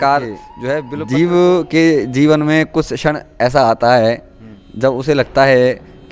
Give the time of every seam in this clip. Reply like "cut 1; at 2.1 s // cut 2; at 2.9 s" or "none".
cut 1; at 0.9 s